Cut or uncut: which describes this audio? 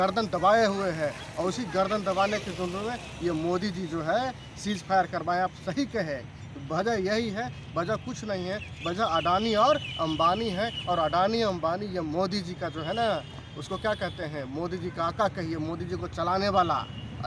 uncut